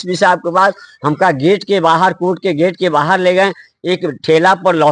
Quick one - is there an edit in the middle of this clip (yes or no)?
no